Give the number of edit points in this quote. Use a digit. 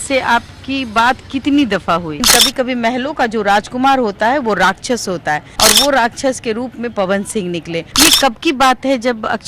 3